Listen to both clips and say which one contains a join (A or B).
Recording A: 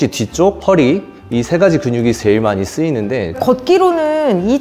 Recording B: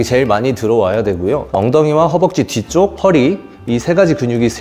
A